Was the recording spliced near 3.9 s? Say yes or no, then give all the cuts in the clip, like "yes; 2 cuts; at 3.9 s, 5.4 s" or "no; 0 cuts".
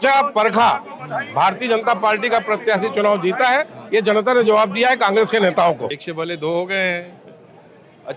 no; 1 cut; at 6.0 s